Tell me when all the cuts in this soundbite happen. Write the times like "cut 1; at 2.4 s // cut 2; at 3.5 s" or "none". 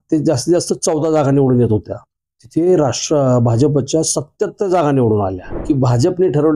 cut 1; at 5.5 s